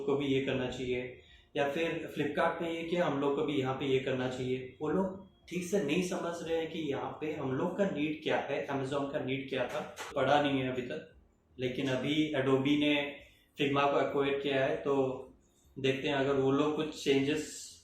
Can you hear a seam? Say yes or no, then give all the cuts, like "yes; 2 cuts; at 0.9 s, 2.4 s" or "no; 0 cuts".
yes; 1 cut; at 10.1 s